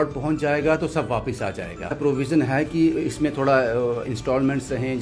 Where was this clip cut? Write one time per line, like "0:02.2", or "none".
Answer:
0:01.9